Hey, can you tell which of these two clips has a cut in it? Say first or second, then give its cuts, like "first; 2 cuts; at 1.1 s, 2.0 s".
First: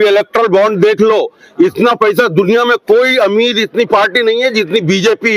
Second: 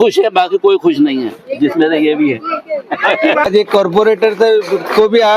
second; 1 cut; at 3.4 s